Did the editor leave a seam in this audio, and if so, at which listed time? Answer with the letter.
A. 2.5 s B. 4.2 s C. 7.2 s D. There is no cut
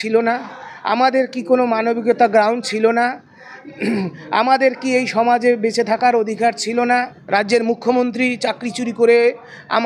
C